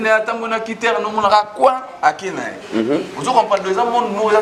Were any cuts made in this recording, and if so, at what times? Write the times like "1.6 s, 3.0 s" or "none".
none